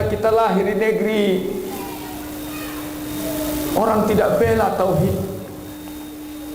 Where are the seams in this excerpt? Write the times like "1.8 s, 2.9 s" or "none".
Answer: none

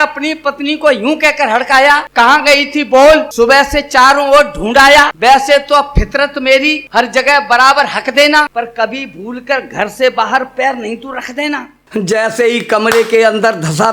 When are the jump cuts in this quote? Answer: 2.1 s, 3.3 s, 5.1 s, 6.8 s, 8.5 s, 11.9 s

